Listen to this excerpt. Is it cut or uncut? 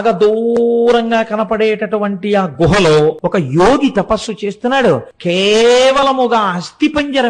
cut